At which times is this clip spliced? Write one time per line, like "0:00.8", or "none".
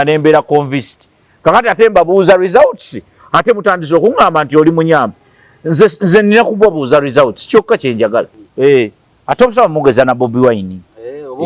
0:08.4